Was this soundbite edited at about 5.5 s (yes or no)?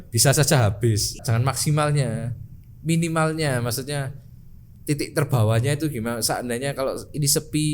no